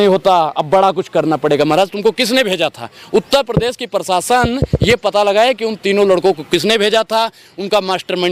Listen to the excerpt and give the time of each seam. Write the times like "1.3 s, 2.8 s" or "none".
none